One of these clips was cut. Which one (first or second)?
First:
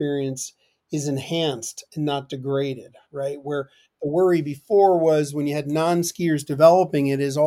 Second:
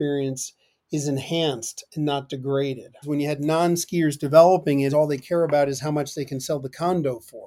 second